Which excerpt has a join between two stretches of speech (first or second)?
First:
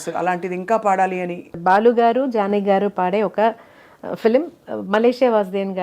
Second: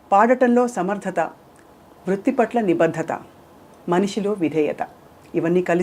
first